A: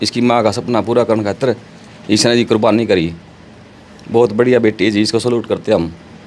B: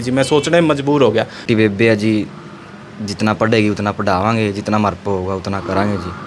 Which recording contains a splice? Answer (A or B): B